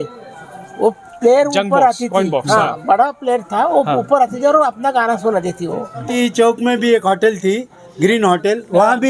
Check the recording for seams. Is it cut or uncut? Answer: cut